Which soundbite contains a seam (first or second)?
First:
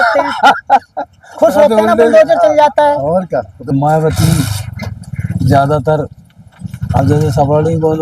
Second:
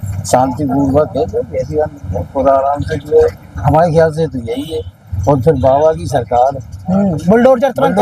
first